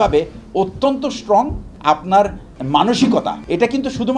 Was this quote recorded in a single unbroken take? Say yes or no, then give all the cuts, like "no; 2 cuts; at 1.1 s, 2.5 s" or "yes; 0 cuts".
no; 3 cuts; at 1.6 s, 2.5 s, 3.4 s